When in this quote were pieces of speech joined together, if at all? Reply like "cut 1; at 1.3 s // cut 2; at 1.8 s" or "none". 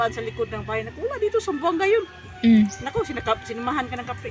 none